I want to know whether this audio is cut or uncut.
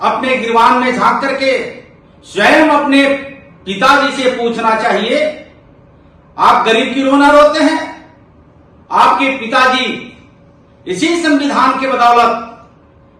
uncut